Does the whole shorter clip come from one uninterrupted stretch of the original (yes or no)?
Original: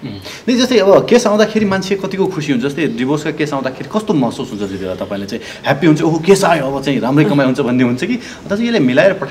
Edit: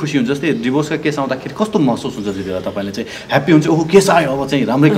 yes